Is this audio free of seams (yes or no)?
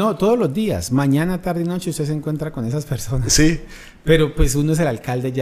yes